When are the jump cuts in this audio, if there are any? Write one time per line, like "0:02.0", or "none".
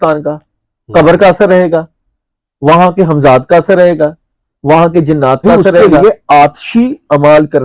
0:05.8